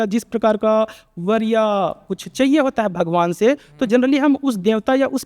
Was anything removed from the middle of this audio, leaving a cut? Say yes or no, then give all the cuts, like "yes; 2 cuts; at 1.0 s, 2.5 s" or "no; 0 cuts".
no; 0 cuts